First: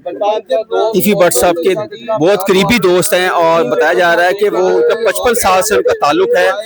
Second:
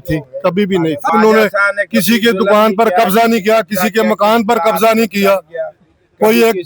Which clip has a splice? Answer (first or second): second